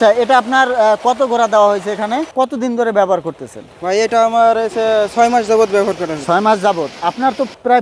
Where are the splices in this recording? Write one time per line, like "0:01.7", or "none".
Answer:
0:02.3